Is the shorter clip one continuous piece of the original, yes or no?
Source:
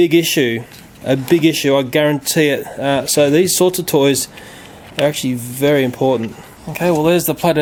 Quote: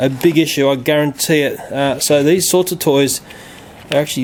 yes